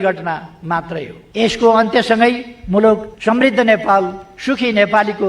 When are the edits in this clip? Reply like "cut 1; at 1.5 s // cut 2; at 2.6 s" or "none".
cut 1; at 1.2 s // cut 2; at 3.1 s